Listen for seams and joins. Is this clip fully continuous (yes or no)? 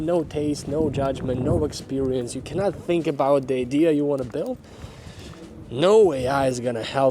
yes